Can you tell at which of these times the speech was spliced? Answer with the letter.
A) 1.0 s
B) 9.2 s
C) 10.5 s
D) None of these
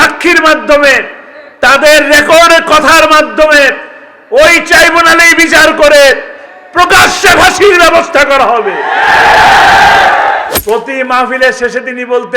C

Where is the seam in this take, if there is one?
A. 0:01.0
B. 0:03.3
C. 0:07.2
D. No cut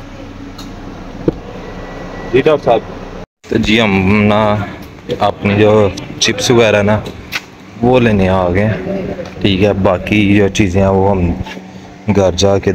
B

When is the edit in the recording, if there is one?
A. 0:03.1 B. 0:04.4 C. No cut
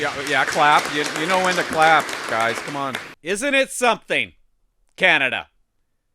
A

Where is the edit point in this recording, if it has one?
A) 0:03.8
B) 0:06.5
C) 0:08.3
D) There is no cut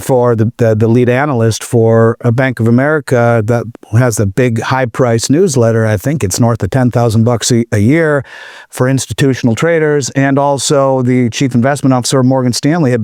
D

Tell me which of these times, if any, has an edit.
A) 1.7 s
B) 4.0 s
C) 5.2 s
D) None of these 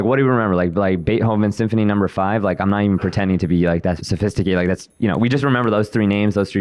B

